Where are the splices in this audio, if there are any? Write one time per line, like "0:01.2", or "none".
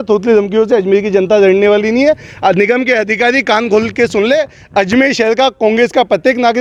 none

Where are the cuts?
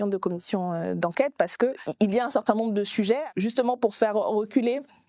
0:01.8
0:03.2

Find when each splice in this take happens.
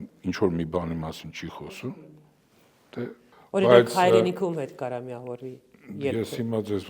0:03.3

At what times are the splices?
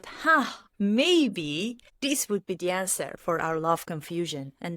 0:01.9

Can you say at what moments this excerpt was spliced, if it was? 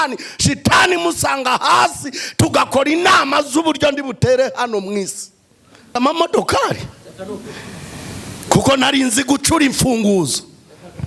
0:06.0

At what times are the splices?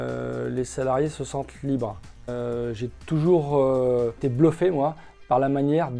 0:02.3
0:04.2

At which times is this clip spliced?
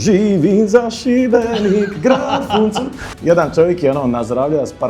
0:03.1

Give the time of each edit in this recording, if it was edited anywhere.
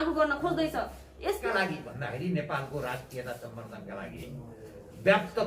0:01.4

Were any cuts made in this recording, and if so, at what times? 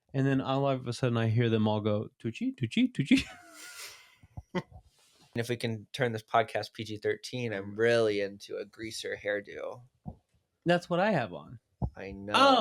0:05.4
0:07.7

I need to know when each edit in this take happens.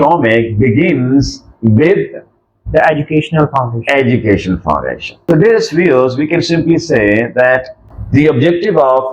0:07.9

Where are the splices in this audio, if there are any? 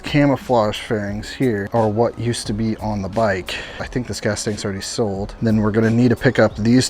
0:01.7
0:03.8
0:05.3

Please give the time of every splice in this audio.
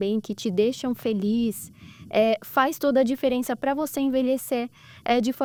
none

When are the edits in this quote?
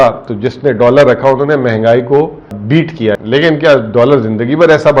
0:02.7

